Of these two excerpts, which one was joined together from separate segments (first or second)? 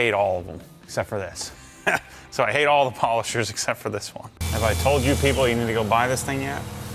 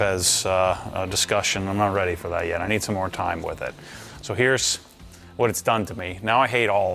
first